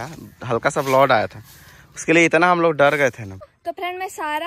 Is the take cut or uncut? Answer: cut